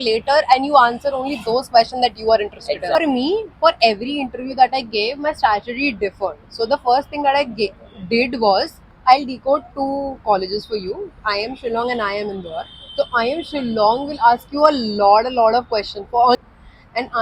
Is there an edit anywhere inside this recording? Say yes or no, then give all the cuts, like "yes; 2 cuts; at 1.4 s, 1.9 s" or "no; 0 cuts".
yes; 3 cuts; at 3.0 s, 8.8 s, 16.4 s